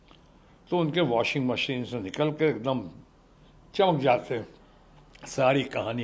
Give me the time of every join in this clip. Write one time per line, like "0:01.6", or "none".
none